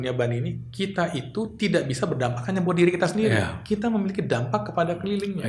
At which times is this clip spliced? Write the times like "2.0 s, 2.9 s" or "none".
none